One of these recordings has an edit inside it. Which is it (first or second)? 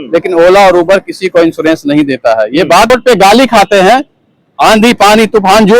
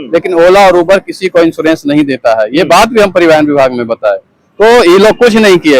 first